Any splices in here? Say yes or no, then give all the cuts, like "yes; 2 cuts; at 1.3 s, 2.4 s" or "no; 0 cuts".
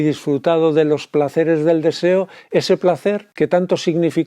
yes; 1 cut; at 3.3 s